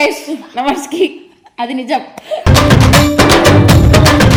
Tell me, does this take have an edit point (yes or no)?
no